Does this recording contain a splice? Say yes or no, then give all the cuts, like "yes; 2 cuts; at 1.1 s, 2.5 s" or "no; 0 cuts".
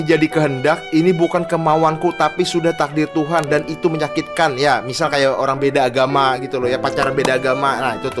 no; 0 cuts